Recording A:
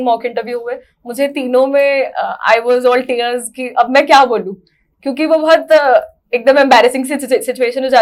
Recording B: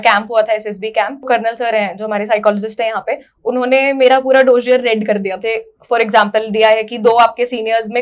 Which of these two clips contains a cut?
B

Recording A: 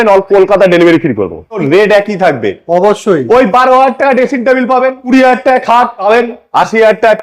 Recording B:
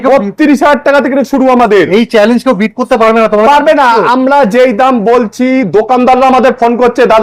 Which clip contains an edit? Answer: A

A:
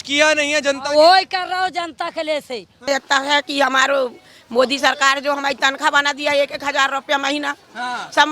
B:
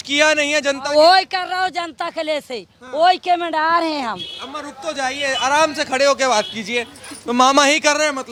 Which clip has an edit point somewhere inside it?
A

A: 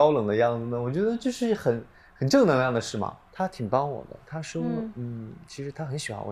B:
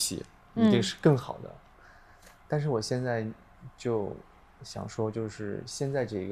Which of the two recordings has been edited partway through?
A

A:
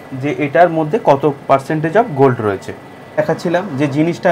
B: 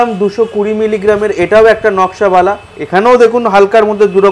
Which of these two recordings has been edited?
A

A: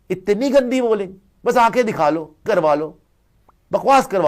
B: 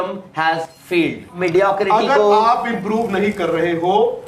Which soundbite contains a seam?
B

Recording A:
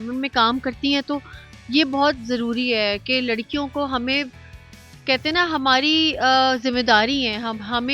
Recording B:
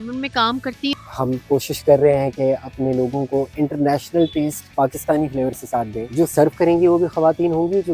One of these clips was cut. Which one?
B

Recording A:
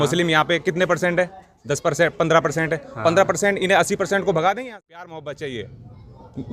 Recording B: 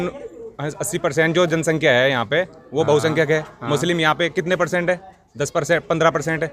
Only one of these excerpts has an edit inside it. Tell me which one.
A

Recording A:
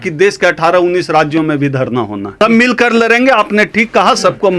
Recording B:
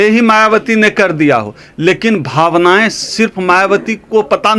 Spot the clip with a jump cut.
A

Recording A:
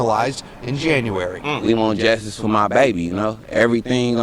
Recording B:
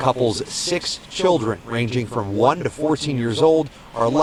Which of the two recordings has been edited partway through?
A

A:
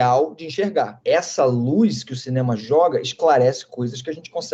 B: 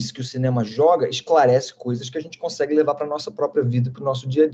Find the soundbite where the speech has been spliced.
A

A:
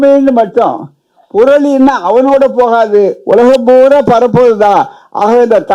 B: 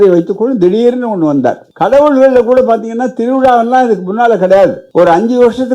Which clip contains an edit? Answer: B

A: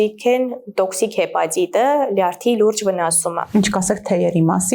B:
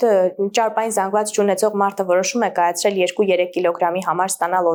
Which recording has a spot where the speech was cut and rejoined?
A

